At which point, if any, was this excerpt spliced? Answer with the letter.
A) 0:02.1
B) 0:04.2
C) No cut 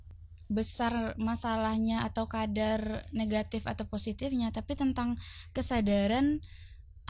C